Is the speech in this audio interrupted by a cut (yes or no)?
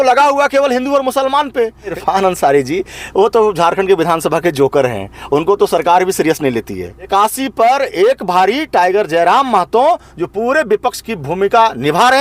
yes